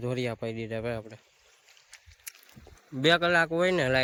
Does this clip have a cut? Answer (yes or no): no